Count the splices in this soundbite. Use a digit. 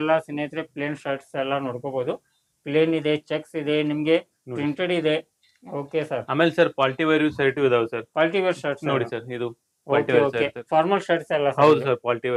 0